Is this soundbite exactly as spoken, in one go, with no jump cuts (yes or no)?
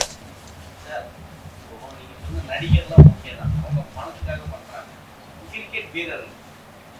yes